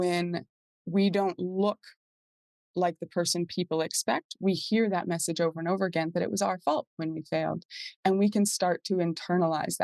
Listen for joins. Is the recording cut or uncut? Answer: uncut